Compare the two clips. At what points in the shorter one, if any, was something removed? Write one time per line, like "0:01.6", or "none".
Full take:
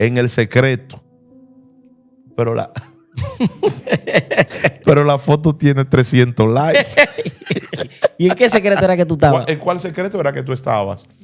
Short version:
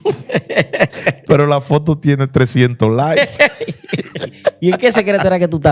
none